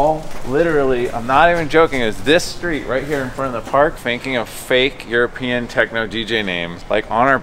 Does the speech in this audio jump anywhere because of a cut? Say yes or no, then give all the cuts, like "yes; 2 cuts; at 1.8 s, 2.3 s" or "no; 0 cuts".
yes; 1 cut; at 4.0 s